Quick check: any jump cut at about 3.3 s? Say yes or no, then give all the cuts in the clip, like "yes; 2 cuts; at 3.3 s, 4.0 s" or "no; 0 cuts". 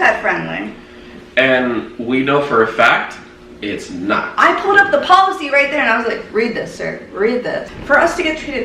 no; 1 cut; at 7.7 s